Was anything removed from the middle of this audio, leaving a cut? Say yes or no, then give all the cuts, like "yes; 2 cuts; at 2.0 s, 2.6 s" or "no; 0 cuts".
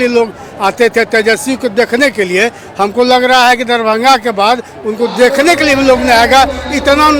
no; 0 cuts